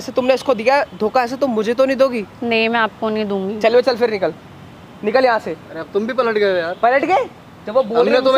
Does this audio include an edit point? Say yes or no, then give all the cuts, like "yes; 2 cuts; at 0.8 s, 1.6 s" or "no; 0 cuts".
no; 0 cuts